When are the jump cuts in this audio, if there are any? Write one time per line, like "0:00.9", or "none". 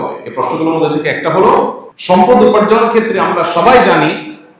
0:01.9

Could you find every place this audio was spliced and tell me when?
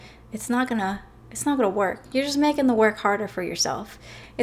none

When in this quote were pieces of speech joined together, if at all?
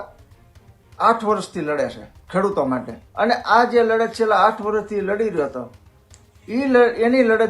0:03.0

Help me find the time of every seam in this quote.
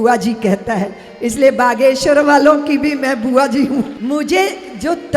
0:04.0

